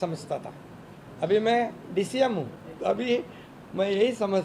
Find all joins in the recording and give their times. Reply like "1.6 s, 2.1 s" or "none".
2.6 s